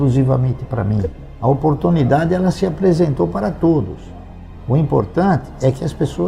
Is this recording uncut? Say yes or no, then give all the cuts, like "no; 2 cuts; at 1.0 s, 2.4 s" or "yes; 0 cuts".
yes; 0 cuts